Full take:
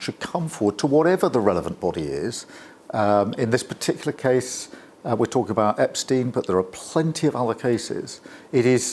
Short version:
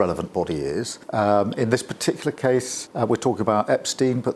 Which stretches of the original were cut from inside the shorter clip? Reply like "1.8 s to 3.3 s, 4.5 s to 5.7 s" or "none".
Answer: 2.4 s to 2.8 s, 4.6 s to 4.9 s